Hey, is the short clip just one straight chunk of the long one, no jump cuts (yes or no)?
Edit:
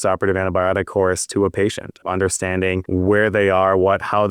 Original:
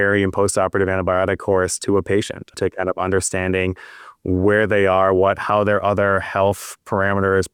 no